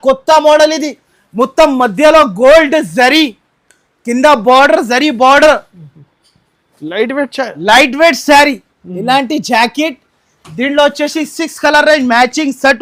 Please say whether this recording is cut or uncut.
uncut